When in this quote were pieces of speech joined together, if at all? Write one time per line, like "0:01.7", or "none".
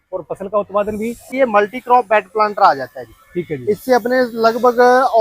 0:01.3